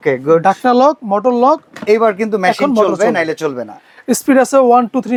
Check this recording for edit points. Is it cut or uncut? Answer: uncut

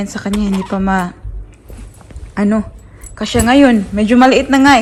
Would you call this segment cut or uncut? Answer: uncut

